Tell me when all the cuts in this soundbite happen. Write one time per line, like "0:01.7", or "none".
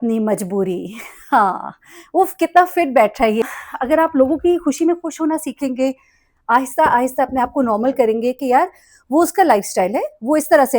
0:03.4